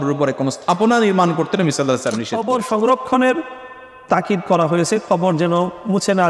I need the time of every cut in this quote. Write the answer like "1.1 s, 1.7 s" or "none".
2.3 s